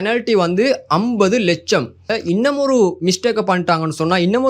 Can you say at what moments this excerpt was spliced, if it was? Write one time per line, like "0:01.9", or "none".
0:02.1